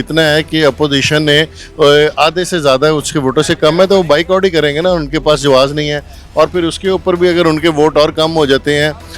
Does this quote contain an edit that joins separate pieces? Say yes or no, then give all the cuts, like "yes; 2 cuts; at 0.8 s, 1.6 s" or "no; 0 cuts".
no; 0 cuts